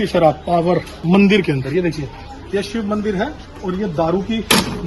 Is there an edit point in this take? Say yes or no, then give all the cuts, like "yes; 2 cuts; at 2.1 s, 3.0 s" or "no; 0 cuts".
yes; 1 cut; at 0.9 s